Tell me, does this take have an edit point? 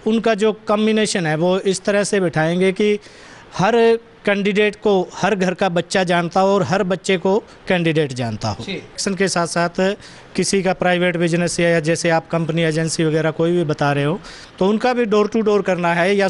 yes; 1 cut; at 9.0 s

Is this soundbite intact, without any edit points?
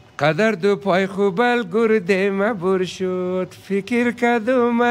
yes; 0 cuts

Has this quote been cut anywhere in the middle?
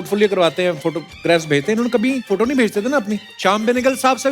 yes; 1 cut; at 3.3 s

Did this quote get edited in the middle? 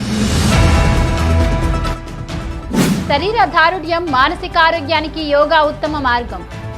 yes; 1 cut; at 2.3 s

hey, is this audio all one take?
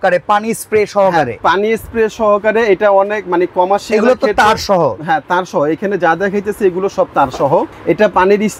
yes; 0 cuts

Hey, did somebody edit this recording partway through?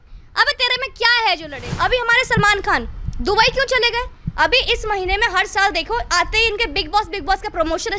yes; 1 cut; at 1.7 s

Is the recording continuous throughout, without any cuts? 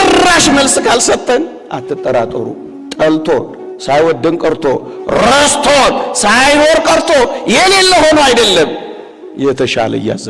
yes; 0 cuts

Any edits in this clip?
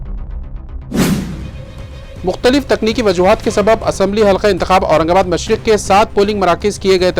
yes; 1 cut; at 1.5 s

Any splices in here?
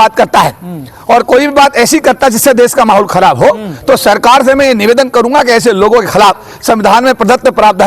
no; 0 cuts

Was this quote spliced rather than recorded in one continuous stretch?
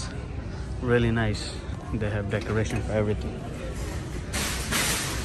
no; 0 cuts

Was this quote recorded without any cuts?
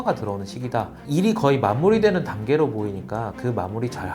no; 1 cut; at 1.0 s

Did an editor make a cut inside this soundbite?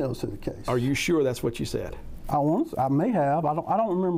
no; 0 cuts

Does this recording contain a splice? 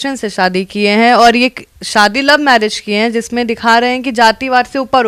no; 0 cuts

